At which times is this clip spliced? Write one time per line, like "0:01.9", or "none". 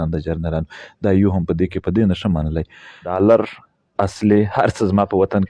0:03.1